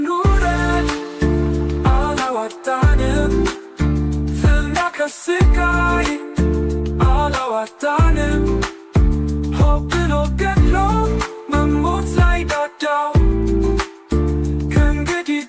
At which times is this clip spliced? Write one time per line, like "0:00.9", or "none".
none